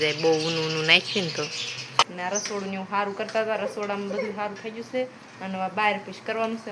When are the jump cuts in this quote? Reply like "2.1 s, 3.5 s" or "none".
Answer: 2.1 s

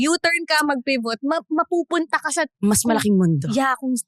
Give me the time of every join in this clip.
none

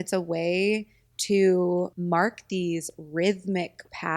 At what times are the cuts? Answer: 1.9 s

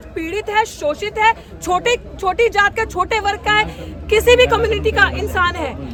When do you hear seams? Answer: none

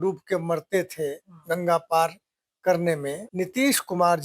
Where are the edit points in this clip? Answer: 3.2 s

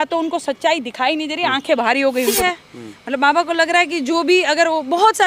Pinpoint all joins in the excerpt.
2.4 s

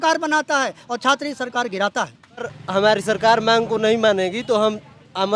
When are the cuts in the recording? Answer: 2.6 s

